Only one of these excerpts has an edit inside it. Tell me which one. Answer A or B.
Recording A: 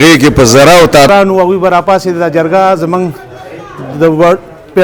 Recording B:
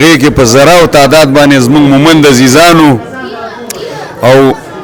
A